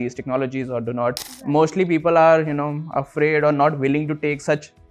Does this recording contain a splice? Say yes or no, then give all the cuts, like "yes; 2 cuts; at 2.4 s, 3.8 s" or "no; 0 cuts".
yes; 1 cut; at 1.2 s